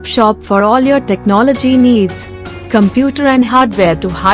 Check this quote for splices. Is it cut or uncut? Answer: uncut